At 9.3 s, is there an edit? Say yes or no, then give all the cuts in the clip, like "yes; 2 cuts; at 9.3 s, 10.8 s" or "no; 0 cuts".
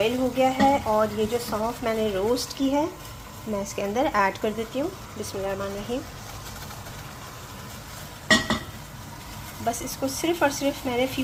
no; 0 cuts